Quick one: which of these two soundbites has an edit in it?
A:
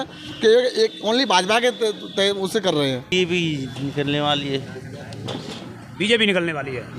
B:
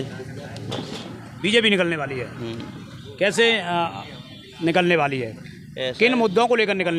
A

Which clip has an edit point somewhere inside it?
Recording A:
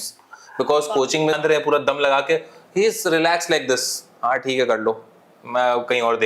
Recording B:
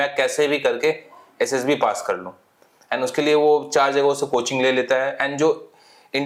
A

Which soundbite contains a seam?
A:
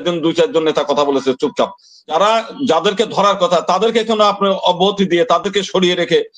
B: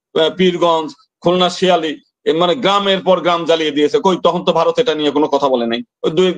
A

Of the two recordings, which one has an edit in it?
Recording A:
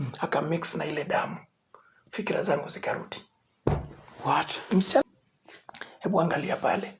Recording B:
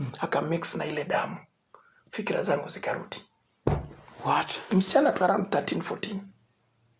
A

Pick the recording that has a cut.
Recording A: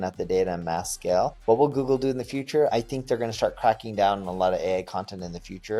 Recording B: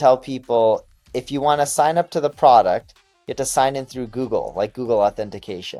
A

